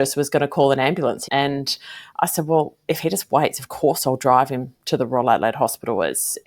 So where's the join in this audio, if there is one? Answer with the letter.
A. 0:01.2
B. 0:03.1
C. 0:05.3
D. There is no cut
A